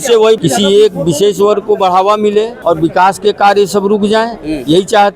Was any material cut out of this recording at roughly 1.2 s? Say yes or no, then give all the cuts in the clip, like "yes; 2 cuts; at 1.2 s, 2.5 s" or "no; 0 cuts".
no; 1 cut; at 2.5 s